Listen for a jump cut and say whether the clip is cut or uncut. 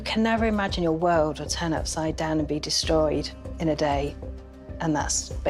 uncut